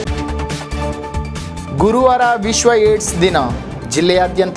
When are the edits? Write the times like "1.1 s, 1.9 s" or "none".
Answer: none